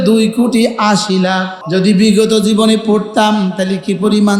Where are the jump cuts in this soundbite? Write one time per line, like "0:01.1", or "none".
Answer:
0:01.6